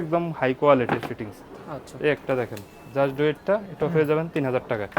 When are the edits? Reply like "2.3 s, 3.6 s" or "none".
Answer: none